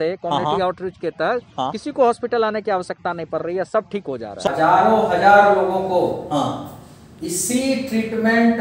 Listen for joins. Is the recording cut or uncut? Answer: cut